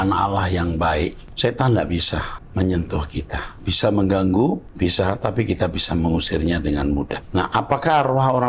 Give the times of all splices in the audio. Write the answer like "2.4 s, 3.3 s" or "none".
1.2 s, 2.4 s, 4.7 s, 7.2 s